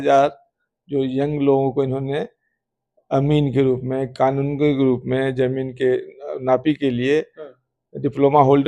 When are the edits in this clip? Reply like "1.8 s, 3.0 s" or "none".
none